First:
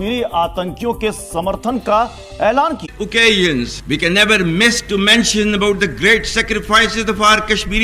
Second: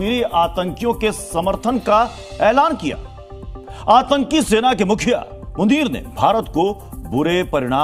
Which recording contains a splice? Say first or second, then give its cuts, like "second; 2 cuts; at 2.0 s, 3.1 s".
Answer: first; 1 cut; at 2.8 s